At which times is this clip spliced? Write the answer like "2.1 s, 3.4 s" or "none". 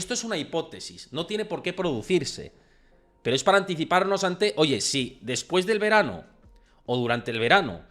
none